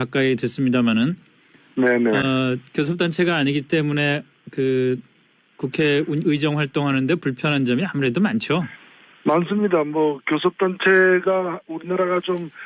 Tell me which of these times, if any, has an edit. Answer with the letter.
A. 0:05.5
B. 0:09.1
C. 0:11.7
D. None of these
B